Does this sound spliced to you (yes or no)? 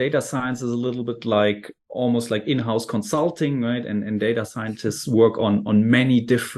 yes